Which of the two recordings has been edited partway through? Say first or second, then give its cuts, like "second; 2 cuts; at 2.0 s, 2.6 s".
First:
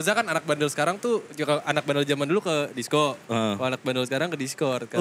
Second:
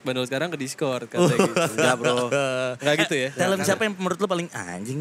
second; 1 cut; at 3.3 s